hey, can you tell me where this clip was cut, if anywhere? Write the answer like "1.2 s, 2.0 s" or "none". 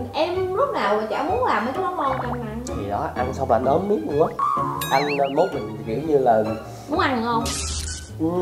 none